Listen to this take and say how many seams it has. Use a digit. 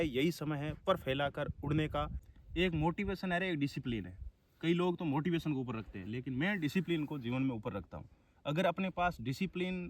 1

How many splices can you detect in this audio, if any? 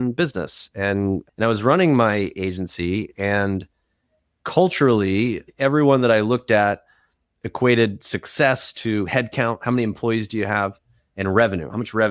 2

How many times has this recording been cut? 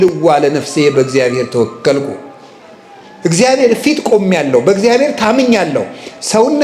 0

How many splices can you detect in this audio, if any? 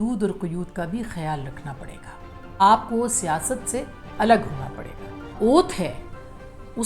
2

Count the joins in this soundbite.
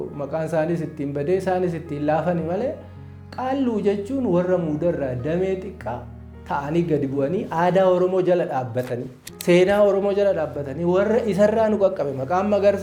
0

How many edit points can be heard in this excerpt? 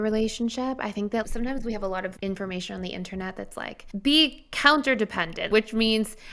2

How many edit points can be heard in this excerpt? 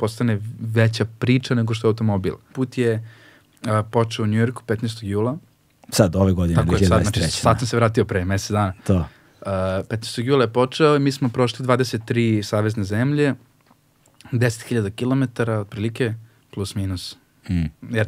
1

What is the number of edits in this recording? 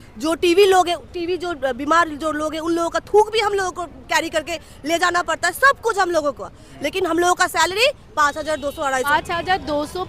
1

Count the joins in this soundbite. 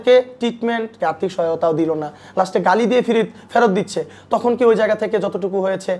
1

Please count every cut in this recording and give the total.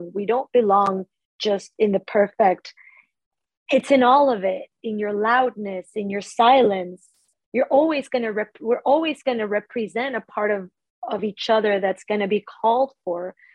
1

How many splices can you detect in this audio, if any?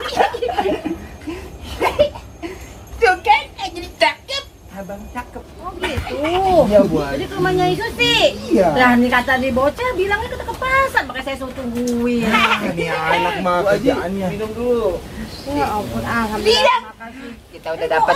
1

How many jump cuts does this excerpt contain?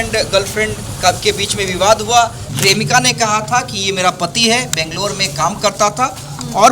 1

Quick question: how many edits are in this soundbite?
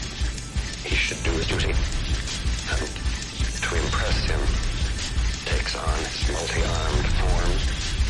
0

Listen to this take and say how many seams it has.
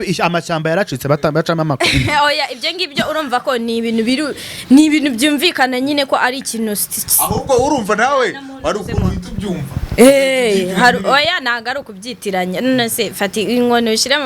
0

